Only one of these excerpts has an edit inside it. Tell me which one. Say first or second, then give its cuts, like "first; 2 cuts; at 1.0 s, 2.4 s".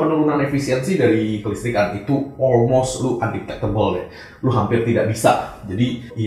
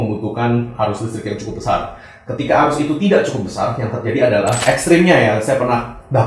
second; 1 cut; at 4.6 s